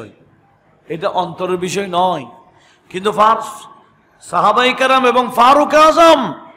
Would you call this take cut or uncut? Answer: uncut